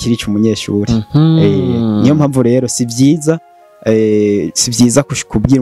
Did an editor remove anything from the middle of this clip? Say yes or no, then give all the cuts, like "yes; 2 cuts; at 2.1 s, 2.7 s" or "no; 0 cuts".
no; 0 cuts